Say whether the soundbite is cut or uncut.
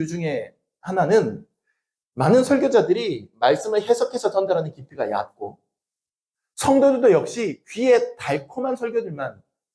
uncut